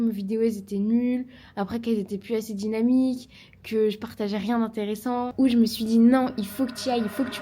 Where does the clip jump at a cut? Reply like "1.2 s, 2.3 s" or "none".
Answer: 5.3 s